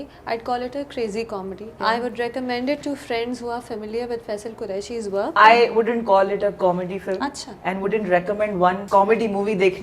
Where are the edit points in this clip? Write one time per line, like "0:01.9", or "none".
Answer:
0:01.7
0:05.3
0:08.8